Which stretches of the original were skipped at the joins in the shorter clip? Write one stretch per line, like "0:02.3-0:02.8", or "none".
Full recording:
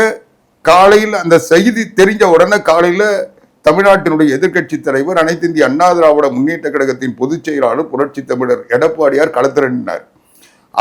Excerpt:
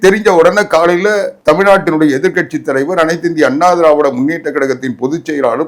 0:03.3-0:03.5